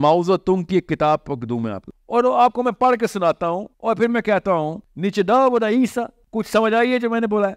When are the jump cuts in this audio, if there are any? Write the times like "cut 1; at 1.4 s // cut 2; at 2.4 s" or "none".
cut 1; at 1.8 s // cut 2; at 3.7 s // cut 3; at 4.8 s // cut 4; at 6.2 s